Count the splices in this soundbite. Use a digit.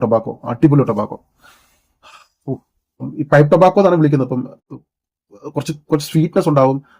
0